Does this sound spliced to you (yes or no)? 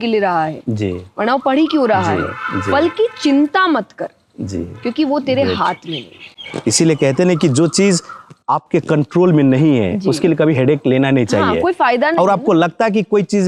no